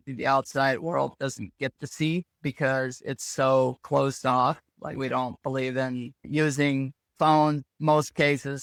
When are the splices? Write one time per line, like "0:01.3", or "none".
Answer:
none